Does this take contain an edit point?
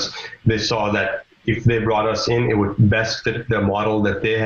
no; 0 cuts

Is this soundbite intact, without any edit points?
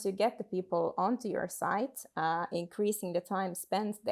yes; 0 cuts

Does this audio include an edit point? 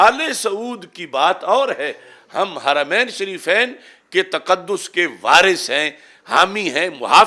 no; 0 cuts

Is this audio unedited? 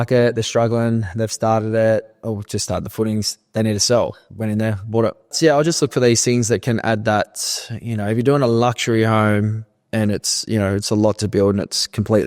no; 1 cut; at 5.3 s

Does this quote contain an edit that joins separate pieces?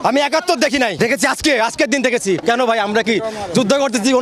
yes; 2 cuts; at 0.9 s, 2.4 s

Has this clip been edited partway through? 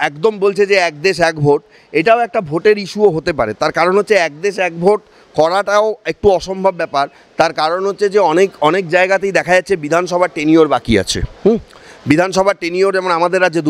no; 0 cuts

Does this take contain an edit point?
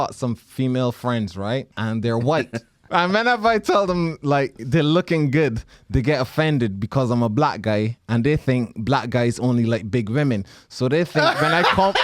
yes; 2 cuts; at 1.7 s, 2.7 s

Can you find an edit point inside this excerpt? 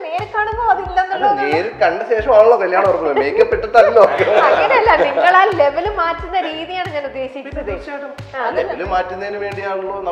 no; 0 cuts

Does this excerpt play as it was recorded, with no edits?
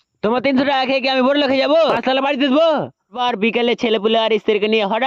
no; 1 cut; at 3.1 s

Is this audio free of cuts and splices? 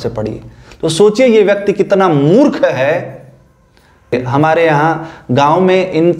no; 1 cut; at 4.2 s

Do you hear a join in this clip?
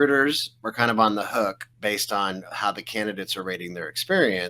yes; 1 cut; at 1.7 s

